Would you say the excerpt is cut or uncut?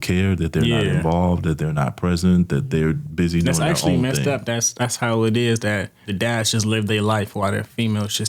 cut